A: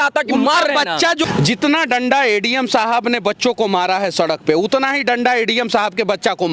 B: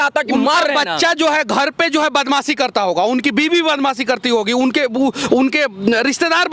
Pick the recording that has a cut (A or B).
A